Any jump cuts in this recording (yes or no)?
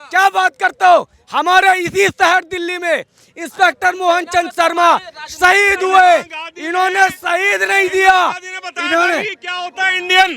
no